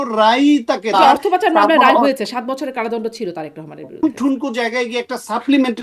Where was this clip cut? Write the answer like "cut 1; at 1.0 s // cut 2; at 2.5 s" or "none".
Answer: cut 1; at 0.9 s // cut 2; at 4.0 s